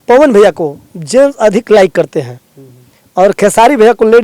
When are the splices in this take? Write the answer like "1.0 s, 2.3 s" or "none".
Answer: none